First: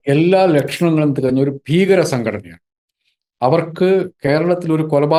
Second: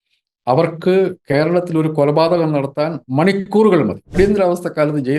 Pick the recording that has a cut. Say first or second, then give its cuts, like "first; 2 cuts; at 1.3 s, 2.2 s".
second; 1 cut; at 4.2 s